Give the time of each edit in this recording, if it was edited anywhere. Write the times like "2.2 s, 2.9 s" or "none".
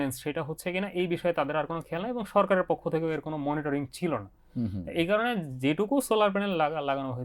none